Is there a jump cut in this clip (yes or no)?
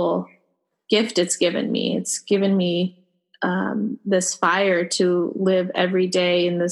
no